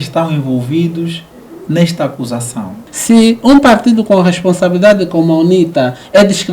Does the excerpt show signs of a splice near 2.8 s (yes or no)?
yes